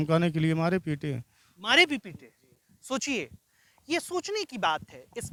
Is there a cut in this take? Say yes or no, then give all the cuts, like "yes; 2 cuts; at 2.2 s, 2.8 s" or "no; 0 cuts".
no; 0 cuts